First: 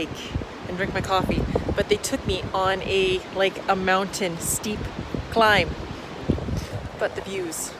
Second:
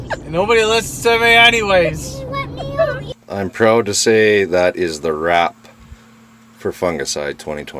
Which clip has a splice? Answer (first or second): second